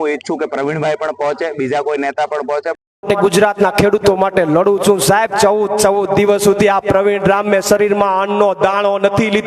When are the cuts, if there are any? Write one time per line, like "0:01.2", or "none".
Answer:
0:03.0